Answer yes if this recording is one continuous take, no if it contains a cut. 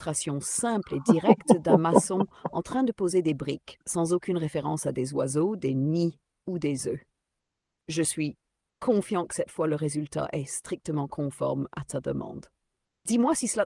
yes